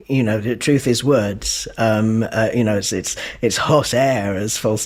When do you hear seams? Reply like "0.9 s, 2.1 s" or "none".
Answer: none

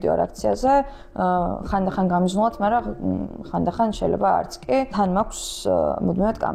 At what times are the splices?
4.9 s

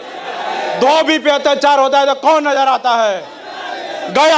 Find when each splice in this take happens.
none

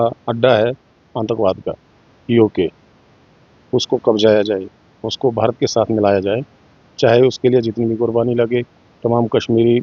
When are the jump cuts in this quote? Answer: none

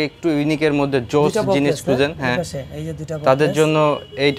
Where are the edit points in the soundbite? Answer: none

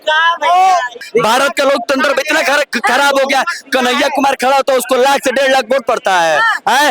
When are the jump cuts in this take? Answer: 1.0 s

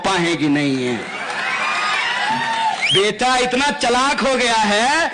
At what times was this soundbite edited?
2.8 s

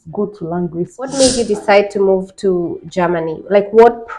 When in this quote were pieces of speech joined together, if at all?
1.1 s

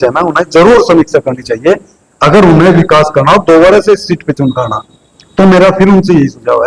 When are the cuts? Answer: none

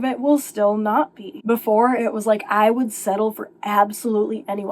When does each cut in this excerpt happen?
1.3 s

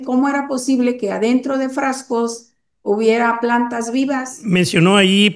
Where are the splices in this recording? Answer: 4.3 s

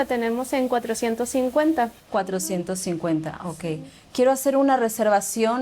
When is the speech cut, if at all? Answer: 2.0 s

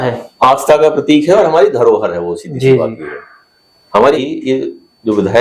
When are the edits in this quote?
4.2 s

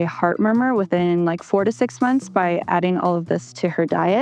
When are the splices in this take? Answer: none

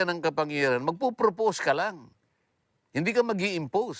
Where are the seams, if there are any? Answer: none

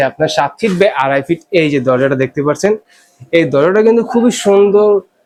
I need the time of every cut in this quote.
none

